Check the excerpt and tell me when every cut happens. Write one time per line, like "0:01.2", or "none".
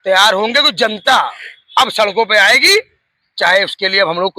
none